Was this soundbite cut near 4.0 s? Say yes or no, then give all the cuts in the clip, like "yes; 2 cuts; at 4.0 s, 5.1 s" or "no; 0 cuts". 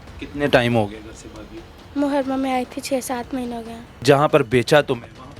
yes; 1 cut; at 4.0 s